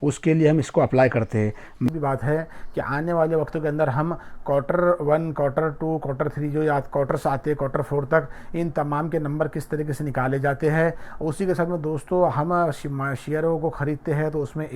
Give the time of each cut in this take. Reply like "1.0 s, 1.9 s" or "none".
1.9 s